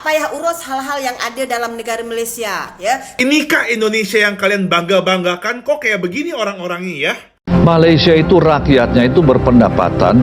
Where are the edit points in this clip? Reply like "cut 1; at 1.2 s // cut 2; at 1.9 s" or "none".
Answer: cut 1; at 3.2 s // cut 2; at 7.3 s